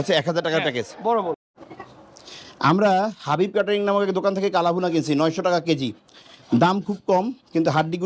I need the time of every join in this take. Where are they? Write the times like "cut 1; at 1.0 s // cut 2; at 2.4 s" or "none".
cut 1; at 1.5 s